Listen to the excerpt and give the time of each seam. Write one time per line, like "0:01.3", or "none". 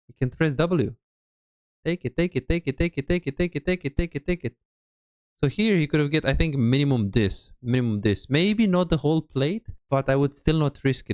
0:09.7